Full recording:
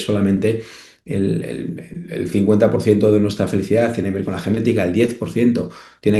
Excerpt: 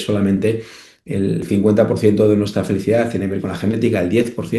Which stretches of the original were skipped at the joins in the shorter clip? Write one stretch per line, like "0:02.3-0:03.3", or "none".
0:01.4-0:02.3